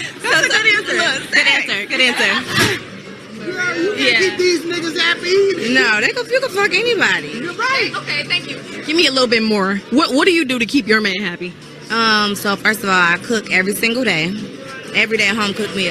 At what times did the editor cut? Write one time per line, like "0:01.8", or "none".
0:11.2

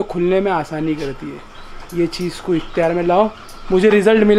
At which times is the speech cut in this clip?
none

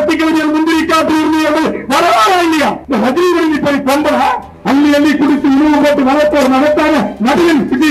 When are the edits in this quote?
0:02.8
0:04.5

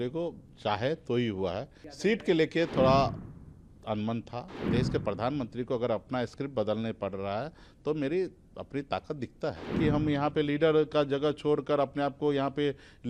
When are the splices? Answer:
0:01.8
0:04.6
0:09.7

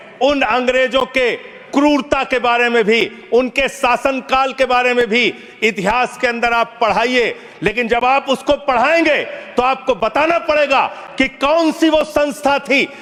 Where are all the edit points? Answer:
none

